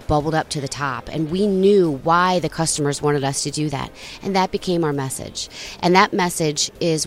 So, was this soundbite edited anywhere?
no; 0 cuts

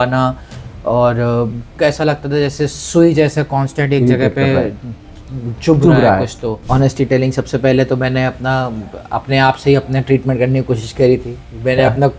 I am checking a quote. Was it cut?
yes; 2 cuts; at 1.7 s, 6.6 s

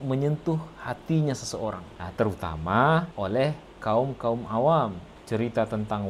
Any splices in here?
no; 0 cuts

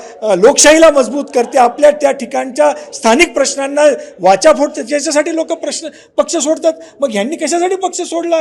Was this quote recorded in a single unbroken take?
yes; 0 cuts

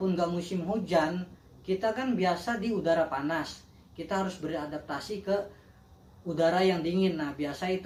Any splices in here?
no; 0 cuts

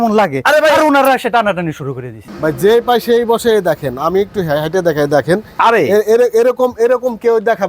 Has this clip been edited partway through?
yes; 1 cut; at 2.2 s

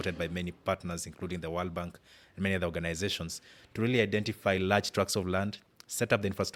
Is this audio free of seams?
yes; 0 cuts

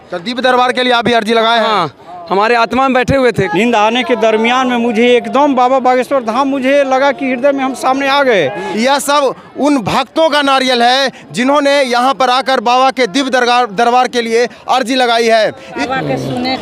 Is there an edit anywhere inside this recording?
yes; 3 cuts; at 3.5 s, 8.7 s, 15.8 s

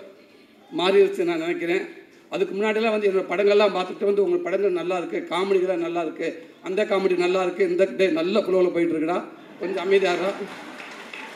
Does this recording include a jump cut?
no; 0 cuts

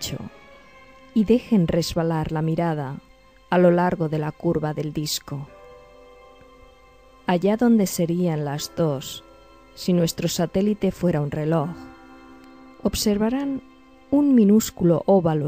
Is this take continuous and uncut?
yes; 0 cuts

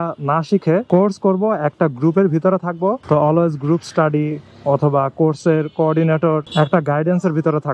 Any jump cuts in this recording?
yes; 3 cuts; at 0.8 s, 3.0 s, 6.5 s

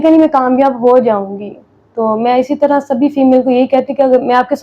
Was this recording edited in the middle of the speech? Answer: no; 0 cuts

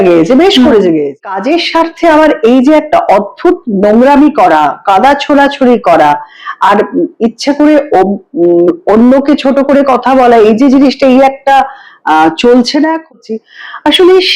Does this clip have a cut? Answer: yes; 2 cuts; at 1.3 s, 13.1 s

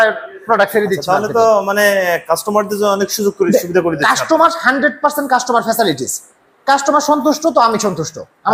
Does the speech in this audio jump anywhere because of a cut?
no; 0 cuts

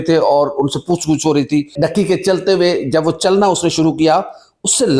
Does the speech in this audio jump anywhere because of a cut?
yes; 1 cut; at 1.7 s

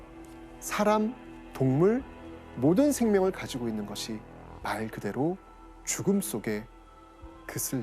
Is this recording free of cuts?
yes; 0 cuts

